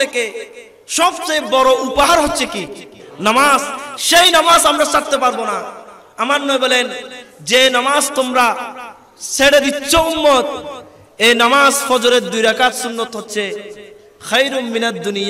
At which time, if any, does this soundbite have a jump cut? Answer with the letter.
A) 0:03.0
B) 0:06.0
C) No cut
A